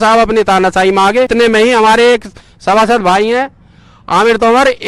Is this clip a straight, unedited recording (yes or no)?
no